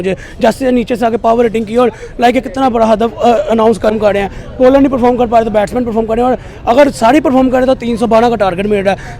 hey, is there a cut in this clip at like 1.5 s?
no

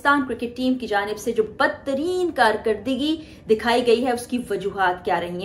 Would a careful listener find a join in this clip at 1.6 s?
no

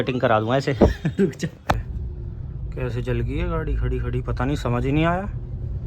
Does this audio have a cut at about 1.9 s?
yes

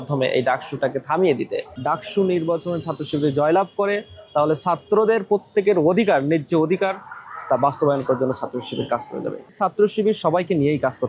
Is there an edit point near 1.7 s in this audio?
yes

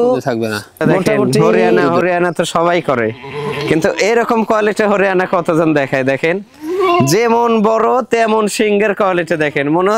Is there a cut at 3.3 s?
no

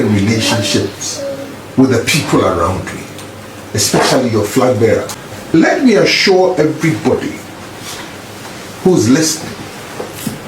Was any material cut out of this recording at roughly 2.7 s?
no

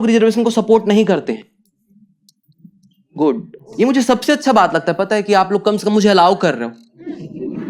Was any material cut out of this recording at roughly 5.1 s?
no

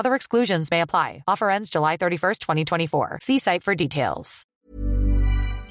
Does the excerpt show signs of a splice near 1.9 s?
no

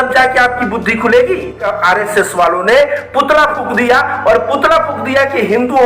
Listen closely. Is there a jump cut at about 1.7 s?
yes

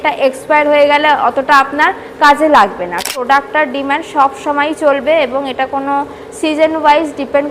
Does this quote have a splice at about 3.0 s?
yes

